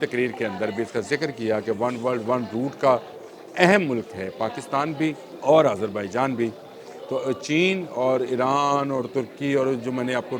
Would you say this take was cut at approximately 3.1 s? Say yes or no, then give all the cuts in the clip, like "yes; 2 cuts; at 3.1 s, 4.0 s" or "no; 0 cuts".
no; 1 cut; at 5.3 s